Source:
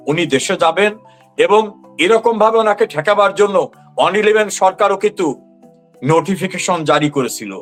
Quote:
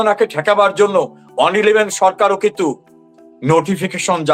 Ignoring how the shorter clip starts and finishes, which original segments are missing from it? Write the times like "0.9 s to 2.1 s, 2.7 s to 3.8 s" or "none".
none